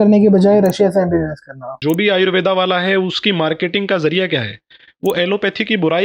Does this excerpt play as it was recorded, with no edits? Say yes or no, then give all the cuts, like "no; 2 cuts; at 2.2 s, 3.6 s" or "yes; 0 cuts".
no; 1 cut; at 1.8 s